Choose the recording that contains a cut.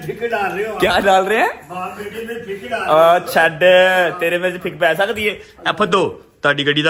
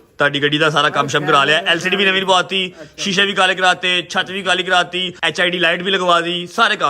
second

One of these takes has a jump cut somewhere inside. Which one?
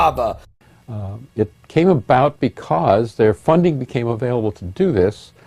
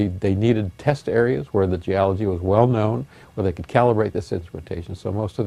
first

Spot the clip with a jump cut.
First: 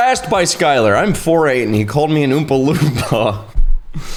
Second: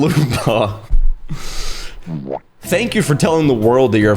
second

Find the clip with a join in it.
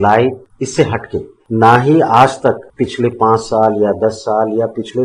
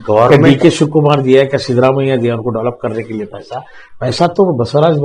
first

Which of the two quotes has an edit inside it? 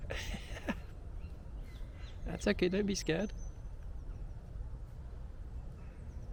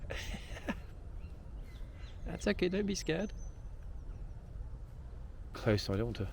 second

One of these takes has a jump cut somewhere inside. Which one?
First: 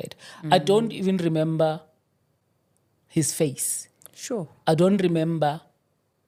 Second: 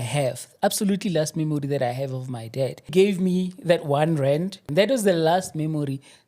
second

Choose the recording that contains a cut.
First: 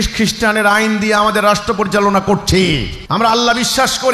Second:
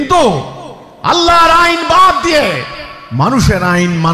first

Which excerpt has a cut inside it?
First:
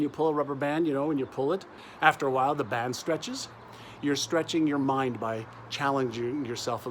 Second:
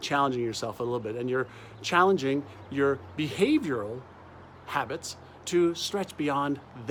first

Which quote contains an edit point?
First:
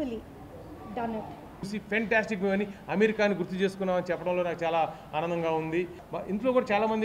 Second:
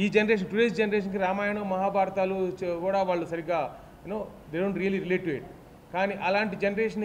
first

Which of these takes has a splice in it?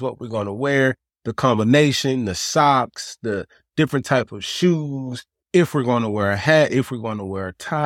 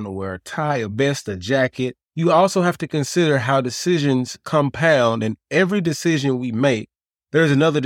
second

